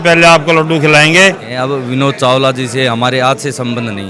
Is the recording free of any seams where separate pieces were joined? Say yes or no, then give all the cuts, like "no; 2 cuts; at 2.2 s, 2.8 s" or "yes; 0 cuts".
no; 1 cut; at 1.5 s